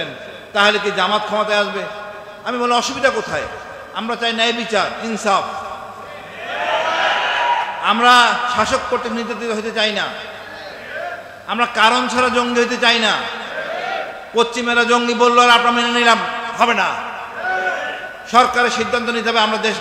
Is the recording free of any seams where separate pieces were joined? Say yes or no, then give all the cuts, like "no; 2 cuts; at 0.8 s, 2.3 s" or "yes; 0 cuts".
yes; 0 cuts